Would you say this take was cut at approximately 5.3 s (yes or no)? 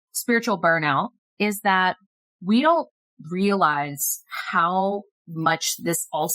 no